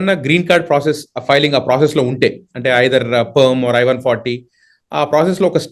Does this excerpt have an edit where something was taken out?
no; 0 cuts

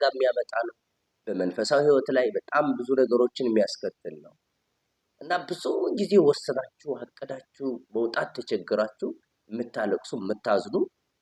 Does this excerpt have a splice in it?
no; 0 cuts

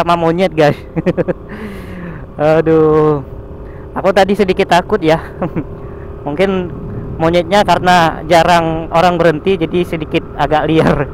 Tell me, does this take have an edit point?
no; 0 cuts

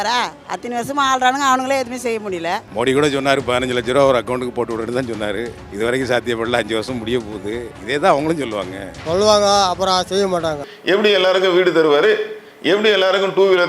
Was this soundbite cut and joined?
yes; 1 cut; at 10.7 s

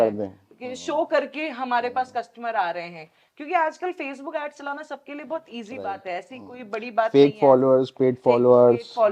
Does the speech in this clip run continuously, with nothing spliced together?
yes; 0 cuts

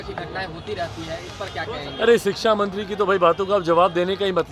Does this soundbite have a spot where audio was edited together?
no; 0 cuts

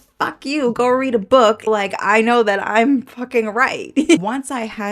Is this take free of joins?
no; 2 cuts; at 1.7 s, 4.2 s

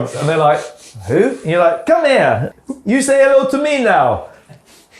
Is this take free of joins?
no; 1 cut; at 2.5 s

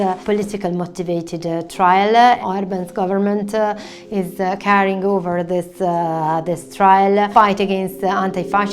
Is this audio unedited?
no; 1 cut; at 2.4 s

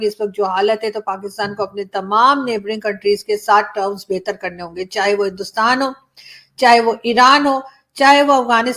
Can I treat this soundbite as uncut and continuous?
yes; 0 cuts

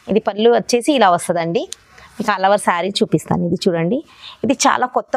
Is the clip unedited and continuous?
yes; 0 cuts

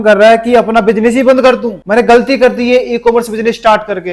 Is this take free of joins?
no; 1 cut; at 1.7 s

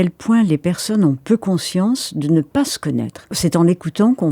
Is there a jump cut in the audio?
yes; 1 cut; at 3.3 s

